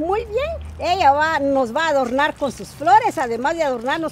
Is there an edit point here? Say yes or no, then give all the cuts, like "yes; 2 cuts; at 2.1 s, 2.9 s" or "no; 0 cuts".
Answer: no; 0 cuts